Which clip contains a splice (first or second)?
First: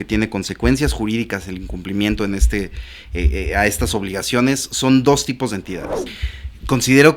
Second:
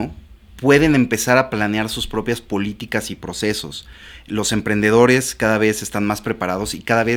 first